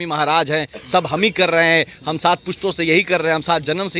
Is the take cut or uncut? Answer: uncut